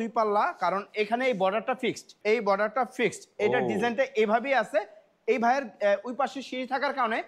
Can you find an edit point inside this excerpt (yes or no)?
yes